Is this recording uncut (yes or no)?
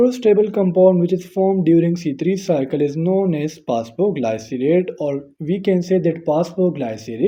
yes